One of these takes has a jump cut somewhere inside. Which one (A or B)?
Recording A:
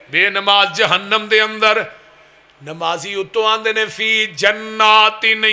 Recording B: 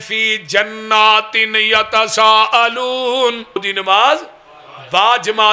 B